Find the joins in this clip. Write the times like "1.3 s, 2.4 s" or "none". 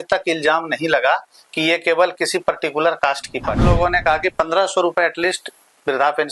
3.6 s